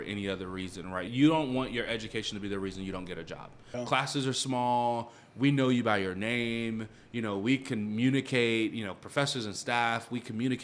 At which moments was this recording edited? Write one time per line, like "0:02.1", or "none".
0:01.1
0:03.6